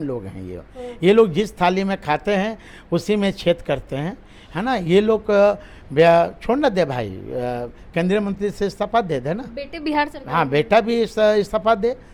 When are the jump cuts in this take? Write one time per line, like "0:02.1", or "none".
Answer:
none

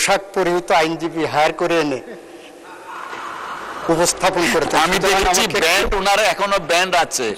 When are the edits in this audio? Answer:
none

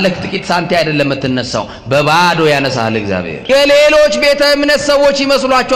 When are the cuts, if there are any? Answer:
0:03.3

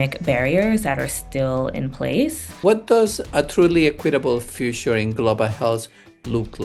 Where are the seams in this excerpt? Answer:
0:02.5

